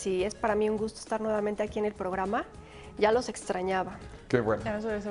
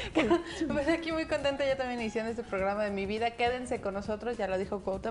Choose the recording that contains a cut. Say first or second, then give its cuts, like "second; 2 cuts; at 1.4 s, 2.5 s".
first; 1 cut; at 3.1 s